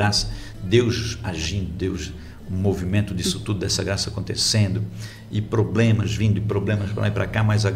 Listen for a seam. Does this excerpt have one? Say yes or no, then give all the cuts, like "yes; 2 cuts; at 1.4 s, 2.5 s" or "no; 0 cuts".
no; 0 cuts